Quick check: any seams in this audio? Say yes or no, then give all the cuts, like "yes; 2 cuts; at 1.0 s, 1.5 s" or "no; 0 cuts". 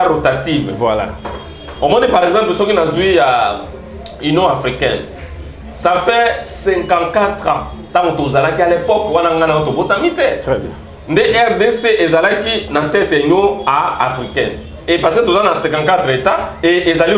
no; 0 cuts